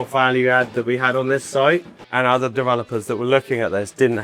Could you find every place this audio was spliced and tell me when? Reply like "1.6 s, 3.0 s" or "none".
2.0 s